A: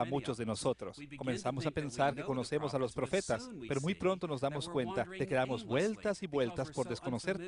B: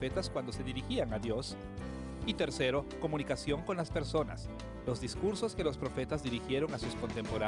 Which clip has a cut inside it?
B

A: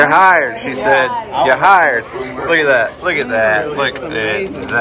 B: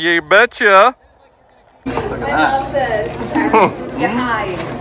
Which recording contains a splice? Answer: B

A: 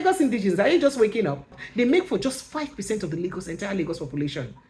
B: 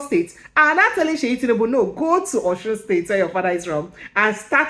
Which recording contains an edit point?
A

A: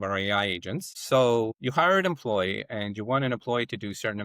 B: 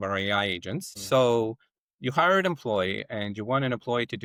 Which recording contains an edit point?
A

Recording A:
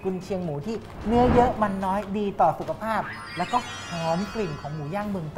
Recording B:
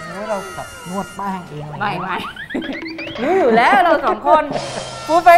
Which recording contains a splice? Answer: A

